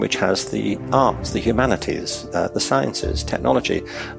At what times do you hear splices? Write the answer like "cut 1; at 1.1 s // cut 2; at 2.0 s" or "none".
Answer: none